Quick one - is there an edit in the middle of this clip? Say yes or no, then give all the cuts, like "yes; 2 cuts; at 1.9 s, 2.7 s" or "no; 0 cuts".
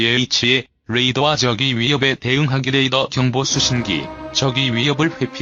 no; 0 cuts